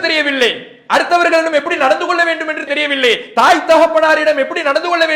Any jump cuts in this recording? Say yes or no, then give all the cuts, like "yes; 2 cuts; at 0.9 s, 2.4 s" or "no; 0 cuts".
no; 0 cuts